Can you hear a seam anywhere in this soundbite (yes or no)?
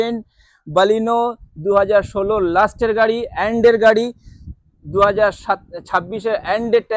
no